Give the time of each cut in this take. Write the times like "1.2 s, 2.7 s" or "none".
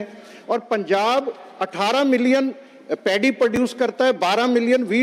none

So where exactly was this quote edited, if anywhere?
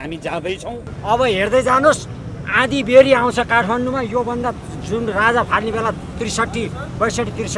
1.0 s

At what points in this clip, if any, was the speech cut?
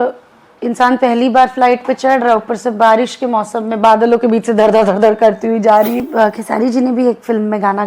6.1 s

